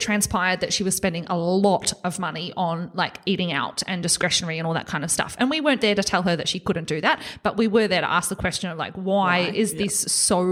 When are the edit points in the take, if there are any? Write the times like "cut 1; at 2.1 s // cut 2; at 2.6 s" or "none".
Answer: none